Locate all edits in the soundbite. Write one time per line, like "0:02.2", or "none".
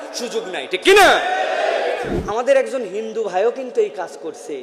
0:02.4